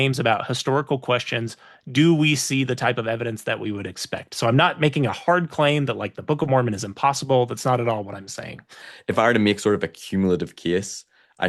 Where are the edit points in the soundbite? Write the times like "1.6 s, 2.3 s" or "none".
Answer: 8.9 s